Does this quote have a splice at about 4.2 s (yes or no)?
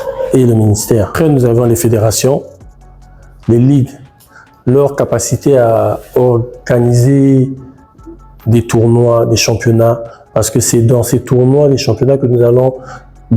no